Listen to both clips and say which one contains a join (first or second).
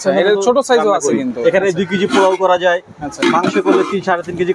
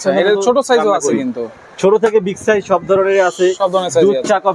first